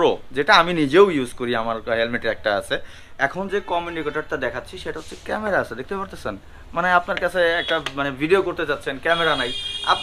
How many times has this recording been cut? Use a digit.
1